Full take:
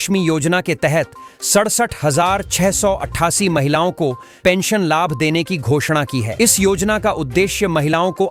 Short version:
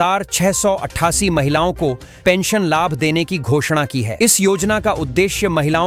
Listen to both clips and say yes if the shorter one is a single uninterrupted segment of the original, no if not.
yes